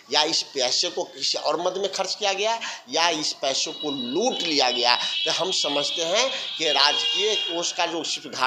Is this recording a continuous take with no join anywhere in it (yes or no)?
yes